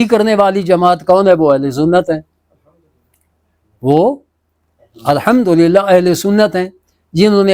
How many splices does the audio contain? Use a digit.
0